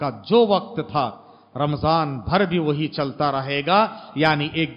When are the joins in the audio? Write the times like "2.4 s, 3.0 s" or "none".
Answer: none